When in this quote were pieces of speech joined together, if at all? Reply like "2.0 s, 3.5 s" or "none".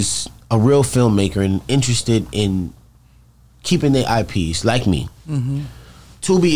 none

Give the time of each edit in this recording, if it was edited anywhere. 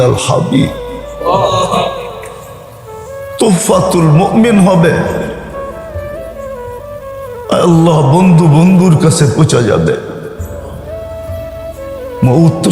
none

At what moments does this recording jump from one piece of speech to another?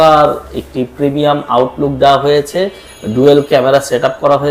none

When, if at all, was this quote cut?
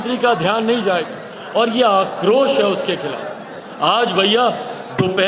none

